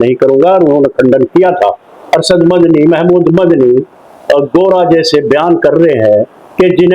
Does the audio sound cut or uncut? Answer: cut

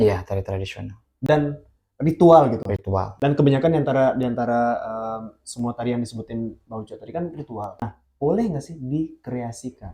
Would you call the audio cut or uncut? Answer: cut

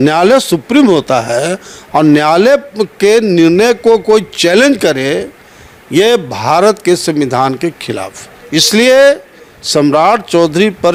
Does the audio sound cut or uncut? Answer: uncut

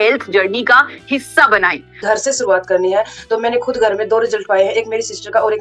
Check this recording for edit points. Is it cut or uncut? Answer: cut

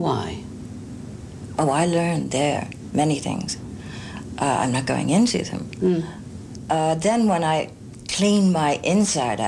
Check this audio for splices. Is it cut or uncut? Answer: cut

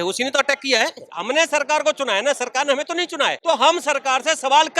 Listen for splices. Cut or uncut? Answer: cut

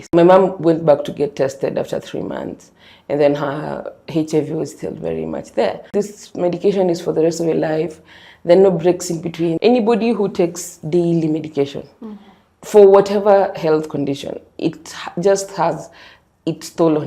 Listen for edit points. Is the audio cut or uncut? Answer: cut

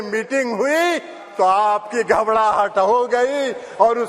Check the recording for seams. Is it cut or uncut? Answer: uncut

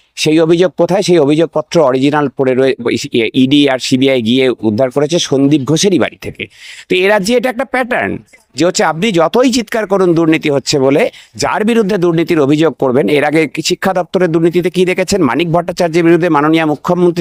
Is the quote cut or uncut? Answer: uncut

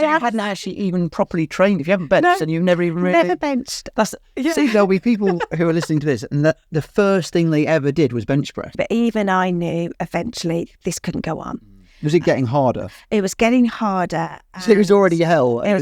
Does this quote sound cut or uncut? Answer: cut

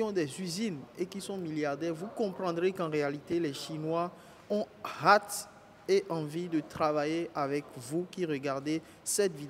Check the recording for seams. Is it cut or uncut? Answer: uncut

